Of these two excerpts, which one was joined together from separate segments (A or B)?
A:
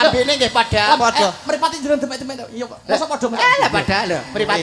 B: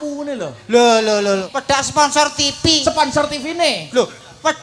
B